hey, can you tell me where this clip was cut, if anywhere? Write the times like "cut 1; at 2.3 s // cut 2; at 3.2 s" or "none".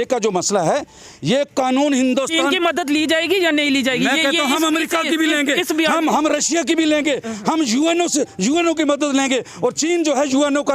none